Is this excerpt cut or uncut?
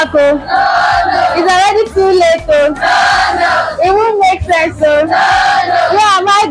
uncut